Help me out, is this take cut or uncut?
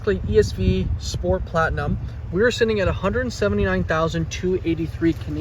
uncut